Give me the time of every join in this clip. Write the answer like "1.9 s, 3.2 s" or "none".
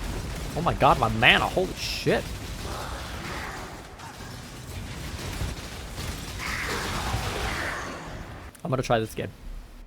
8.4 s